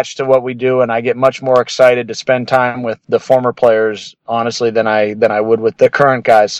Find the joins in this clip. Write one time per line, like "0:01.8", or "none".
none